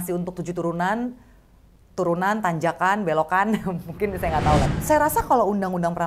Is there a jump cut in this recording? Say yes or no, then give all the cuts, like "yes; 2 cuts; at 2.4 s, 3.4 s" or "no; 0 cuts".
yes; 1 cut; at 4.7 s